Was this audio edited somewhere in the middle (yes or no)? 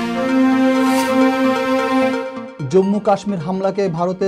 yes